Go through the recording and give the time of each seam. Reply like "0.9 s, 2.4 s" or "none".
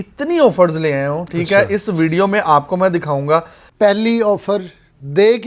3.6 s